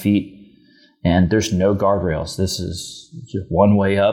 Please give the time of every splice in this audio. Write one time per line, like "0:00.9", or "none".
none